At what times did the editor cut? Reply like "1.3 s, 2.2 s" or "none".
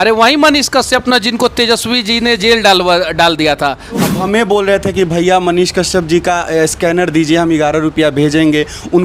4.1 s